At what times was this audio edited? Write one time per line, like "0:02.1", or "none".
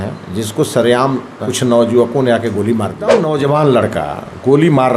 0:01.4
0:03.2